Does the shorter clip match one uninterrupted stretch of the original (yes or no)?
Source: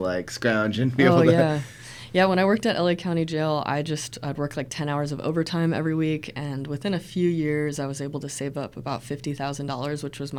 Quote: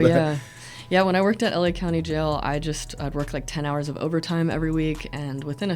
yes